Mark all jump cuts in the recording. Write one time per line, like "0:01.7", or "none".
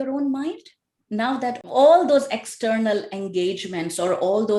none